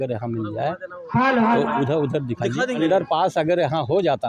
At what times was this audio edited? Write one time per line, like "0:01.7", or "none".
0:02.8